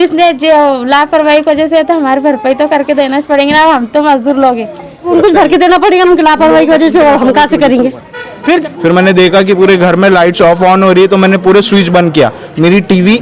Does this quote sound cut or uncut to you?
cut